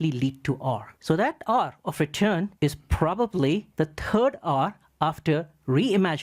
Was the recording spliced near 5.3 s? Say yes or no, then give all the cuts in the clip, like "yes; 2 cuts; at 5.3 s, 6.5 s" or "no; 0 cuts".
no; 3 cuts; at 0.9 s, 2.5 s, 3.7 s